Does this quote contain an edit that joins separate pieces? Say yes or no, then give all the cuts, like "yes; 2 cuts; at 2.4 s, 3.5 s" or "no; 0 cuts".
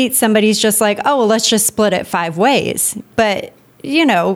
yes; 1 cut; at 3.1 s